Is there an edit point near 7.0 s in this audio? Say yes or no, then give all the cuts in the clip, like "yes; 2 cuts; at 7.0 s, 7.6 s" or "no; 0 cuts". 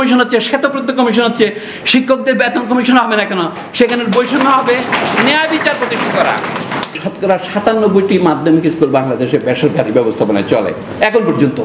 yes; 1 cut; at 7.0 s